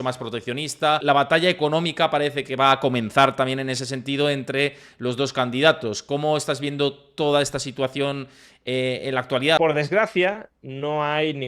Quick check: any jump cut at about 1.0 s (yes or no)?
yes